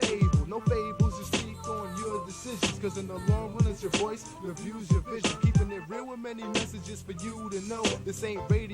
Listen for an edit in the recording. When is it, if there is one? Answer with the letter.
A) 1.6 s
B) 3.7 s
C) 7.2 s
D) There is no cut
B